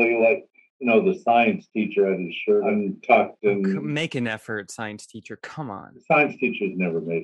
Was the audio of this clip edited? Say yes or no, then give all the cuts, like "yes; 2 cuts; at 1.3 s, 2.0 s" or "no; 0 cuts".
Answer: yes; 2 cuts; at 2.7 s, 3.8 s